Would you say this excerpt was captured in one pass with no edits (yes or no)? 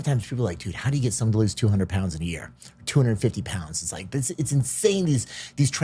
yes